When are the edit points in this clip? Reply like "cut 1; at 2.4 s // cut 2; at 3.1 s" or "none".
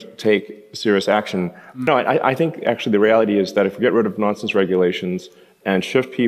cut 1; at 1.8 s